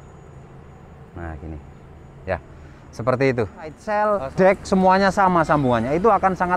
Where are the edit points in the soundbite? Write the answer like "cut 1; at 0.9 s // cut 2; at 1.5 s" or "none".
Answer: cut 1; at 3.8 s